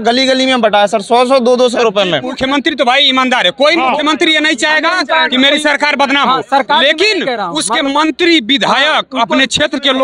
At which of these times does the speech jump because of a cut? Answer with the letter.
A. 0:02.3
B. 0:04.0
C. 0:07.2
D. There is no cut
A